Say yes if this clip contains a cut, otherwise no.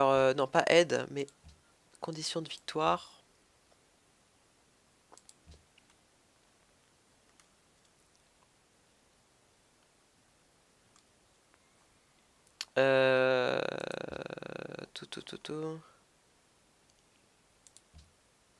yes